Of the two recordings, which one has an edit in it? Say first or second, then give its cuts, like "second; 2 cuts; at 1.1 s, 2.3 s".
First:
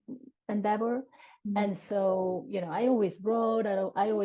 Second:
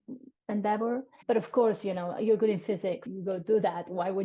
second; 2 cuts; at 1.2 s, 3.1 s